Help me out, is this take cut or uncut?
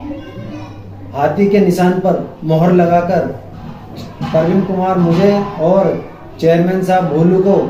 uncut